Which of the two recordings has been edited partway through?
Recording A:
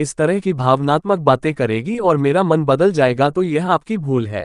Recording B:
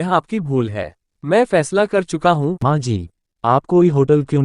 B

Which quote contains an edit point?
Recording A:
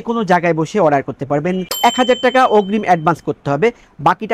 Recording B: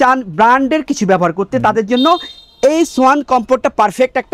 A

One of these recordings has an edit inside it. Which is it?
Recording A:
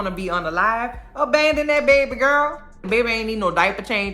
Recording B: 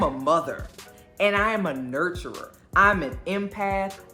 A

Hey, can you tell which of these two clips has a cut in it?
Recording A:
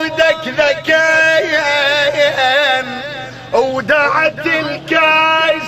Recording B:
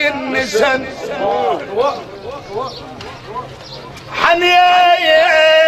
B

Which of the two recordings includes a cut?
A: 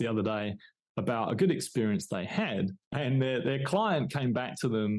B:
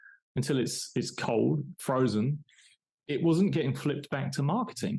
A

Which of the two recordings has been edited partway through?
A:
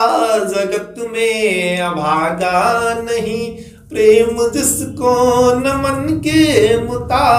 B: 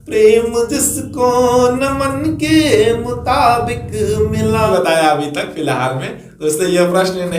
B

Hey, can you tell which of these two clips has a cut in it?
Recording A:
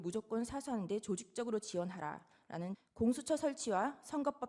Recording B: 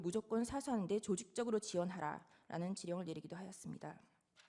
A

